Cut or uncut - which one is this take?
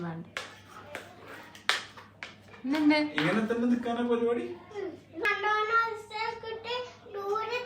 cut